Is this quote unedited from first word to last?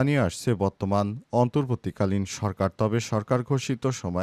yes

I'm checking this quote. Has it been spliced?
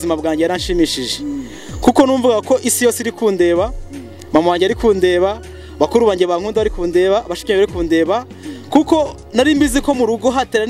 no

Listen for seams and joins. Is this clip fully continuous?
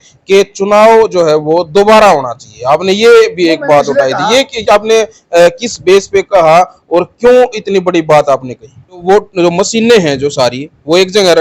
no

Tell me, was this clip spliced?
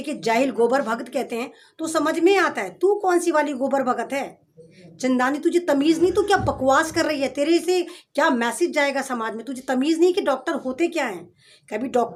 no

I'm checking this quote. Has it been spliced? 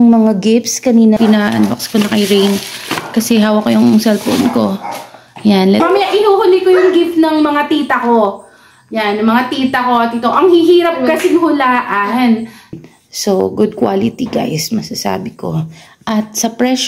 yes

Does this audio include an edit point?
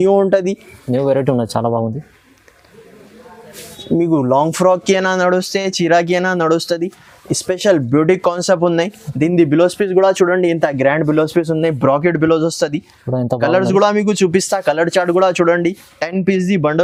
no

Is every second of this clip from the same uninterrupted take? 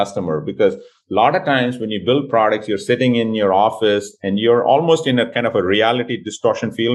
yes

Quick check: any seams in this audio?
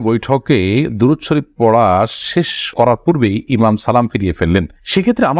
no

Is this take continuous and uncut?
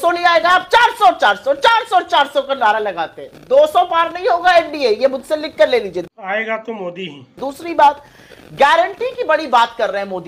yes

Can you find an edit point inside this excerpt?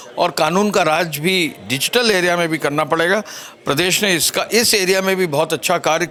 no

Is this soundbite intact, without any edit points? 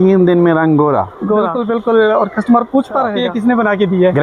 no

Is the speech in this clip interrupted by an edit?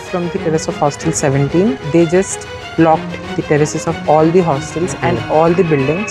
yes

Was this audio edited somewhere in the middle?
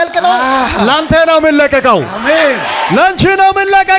no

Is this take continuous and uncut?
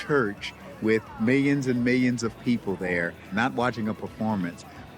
no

